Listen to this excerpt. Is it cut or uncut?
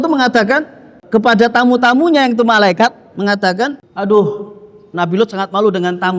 cut